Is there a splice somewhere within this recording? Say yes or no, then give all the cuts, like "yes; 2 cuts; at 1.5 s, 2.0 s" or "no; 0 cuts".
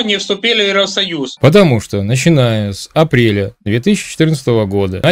yes; 1 cut; at 1.3 s